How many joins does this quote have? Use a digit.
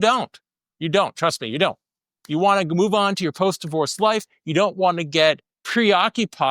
1